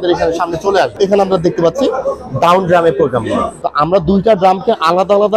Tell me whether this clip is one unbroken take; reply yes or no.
no